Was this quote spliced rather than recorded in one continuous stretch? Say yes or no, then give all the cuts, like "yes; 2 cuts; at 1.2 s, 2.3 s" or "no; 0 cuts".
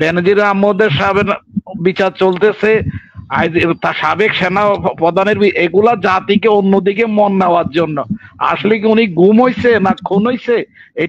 no; 0 cuts